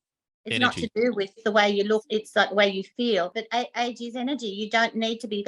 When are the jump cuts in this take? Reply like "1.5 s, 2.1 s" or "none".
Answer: 1.4 s, 2.0 s, 3.4 s